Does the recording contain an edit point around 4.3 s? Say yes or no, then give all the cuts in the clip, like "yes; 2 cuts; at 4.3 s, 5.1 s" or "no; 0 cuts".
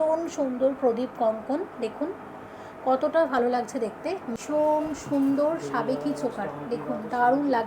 yes; 1 cut; at 4.3 s